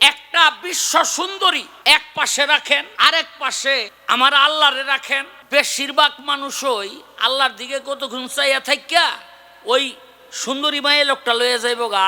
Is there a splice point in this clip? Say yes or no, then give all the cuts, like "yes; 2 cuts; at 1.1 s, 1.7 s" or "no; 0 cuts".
yes; 4 cuts; at 1.7 s, 2.9 s, 3.9 s, 5.3 s